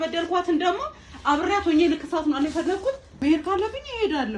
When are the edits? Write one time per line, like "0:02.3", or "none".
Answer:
0:03.1